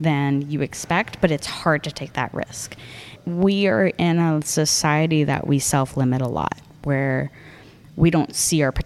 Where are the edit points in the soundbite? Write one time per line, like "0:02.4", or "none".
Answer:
0:03.1